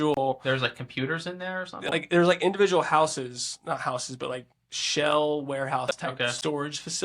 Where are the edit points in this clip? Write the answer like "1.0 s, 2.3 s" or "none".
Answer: none